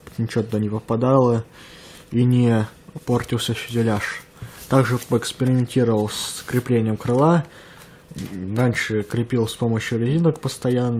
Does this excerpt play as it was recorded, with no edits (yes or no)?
yes